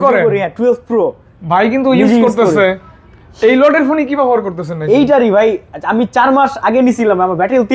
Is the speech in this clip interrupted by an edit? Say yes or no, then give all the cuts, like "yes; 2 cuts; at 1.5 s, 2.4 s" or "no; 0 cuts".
no; 0 cuts